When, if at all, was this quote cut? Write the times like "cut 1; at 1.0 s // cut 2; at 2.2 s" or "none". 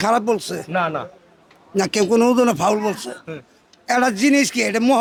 none